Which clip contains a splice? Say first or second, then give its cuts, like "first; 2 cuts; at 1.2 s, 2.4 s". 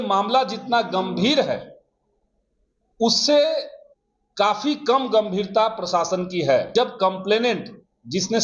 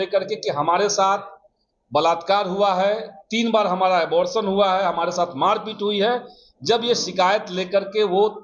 first; 1 cut; at 6.7 s